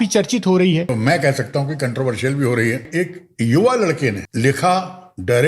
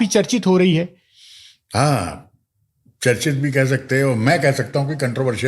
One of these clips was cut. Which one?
first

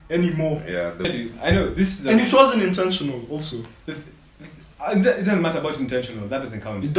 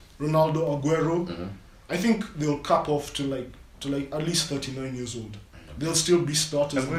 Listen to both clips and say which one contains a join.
first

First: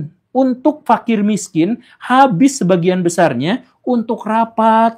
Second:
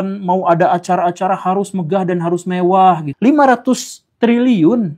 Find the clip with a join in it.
second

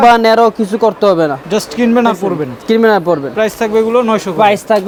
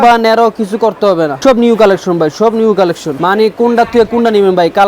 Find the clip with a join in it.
second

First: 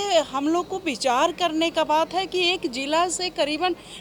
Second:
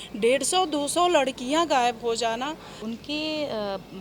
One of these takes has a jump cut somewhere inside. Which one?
second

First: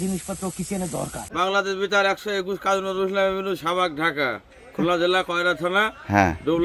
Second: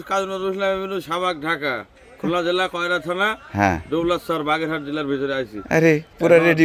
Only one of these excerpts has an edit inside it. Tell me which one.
first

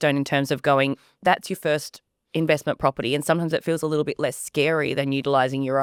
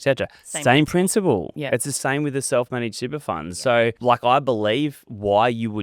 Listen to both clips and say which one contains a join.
second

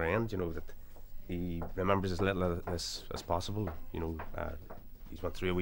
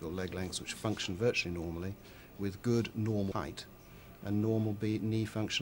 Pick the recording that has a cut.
second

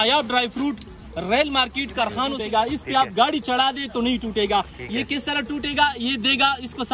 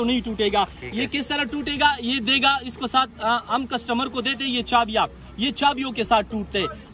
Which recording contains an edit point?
first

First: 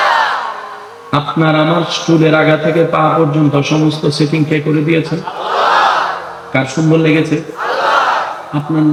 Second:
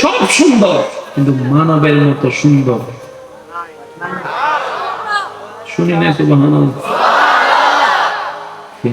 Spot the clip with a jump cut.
second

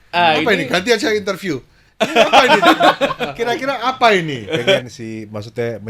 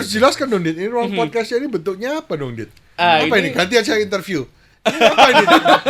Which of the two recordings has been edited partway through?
first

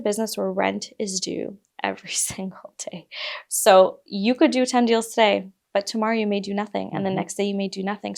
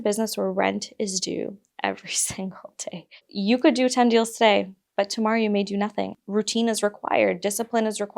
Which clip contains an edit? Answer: second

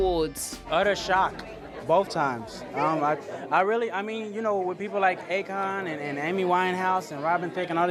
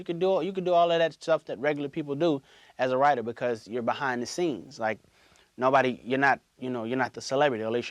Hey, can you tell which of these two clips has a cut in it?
second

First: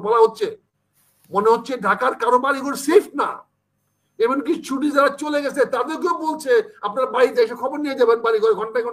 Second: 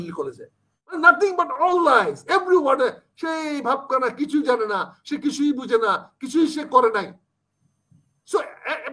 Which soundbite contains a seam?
second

